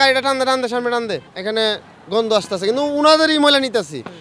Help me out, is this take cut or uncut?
cut